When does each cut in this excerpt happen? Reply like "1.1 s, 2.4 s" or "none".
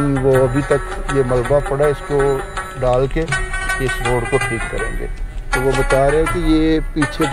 none